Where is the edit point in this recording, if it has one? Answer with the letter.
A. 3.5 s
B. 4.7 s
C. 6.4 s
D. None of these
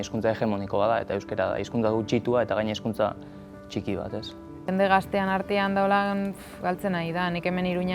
B